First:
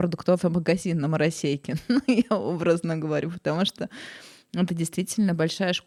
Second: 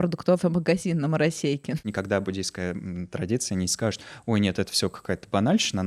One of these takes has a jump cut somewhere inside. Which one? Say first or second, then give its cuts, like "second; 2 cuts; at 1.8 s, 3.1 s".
second; 1 cut; at 1.8 s